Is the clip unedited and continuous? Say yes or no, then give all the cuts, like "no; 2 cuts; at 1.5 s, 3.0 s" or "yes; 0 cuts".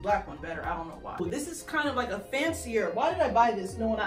no; 1 cut; at 1.1 s